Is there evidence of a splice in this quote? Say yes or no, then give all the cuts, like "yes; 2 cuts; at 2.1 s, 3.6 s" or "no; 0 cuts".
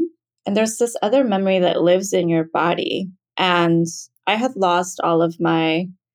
yes; 1 cut; at 3.2 s